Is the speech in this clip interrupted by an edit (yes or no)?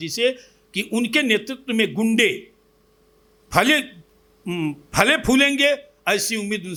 no